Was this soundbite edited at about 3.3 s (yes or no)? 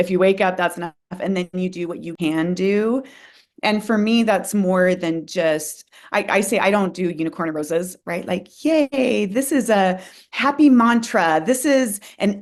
no